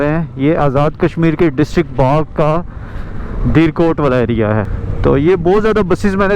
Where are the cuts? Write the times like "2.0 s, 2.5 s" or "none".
4.8 s